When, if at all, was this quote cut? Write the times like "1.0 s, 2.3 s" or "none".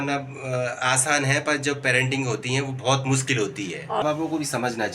4.0 s